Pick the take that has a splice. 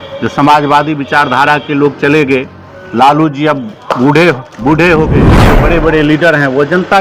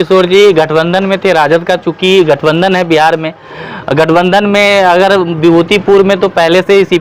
first; 1 cut; at 5.6 s

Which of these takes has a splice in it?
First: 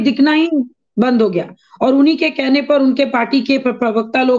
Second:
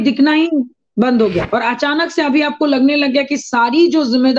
second; 1 cut; at 1.4 s

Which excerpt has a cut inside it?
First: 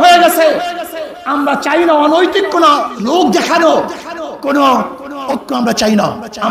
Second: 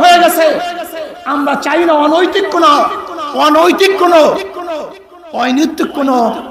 first; 1 cut; at 2.9 s

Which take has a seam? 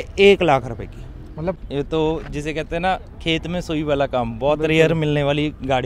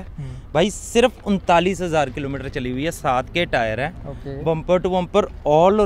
first; 1 cut; at 1.6 s

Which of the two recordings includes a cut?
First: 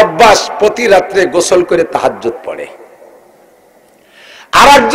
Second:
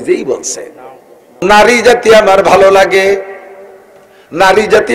second; 1 cut; at 1.3 s

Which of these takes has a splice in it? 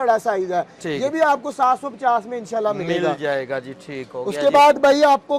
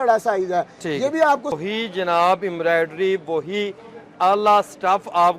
second; 1 cut; at 1.5 s

